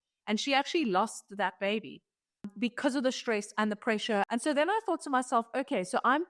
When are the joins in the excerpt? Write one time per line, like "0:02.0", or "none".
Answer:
0:02.5
0:04.3